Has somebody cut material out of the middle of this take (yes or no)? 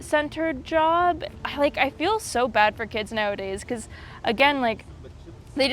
yes